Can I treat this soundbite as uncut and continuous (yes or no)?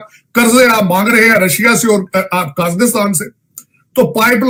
yes